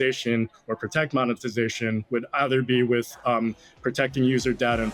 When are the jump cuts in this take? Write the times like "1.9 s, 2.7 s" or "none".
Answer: none